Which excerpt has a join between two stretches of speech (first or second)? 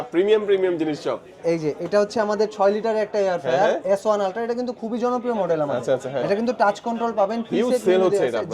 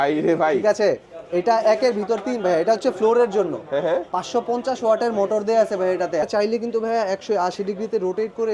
second